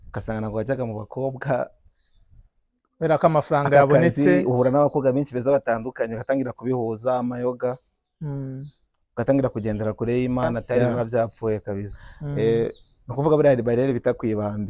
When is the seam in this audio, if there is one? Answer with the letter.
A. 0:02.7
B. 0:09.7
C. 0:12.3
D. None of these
C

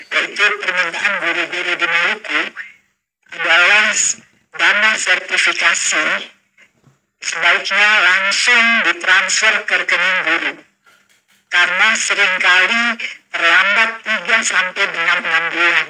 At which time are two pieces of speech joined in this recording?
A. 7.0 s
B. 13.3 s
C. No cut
C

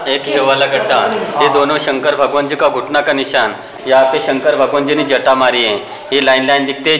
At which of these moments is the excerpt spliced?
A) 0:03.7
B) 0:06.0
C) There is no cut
A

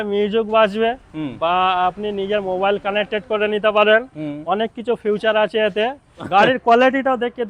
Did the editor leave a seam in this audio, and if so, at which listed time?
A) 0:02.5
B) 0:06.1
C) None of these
B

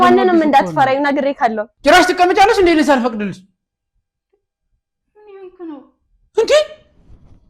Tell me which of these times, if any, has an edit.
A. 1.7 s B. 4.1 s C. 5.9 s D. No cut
A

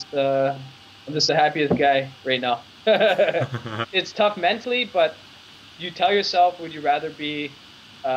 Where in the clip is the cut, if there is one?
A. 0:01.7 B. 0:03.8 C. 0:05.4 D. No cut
B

